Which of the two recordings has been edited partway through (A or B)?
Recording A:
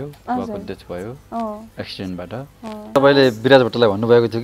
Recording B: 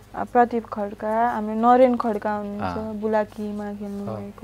A